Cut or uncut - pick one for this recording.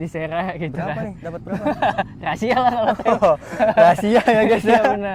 uncut